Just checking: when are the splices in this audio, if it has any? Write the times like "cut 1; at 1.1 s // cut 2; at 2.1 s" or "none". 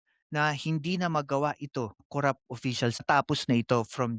cut 1; at 3.0 s